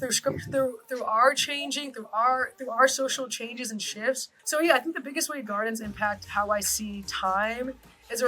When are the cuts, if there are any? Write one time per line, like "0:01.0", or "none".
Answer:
0:04.3